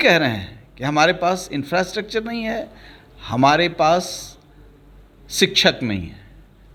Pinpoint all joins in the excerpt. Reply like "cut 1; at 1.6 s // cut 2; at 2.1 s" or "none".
none